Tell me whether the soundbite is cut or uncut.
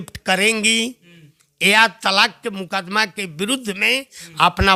uncut